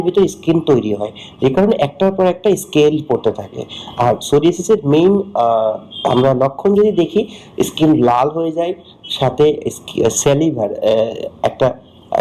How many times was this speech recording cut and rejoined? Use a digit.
0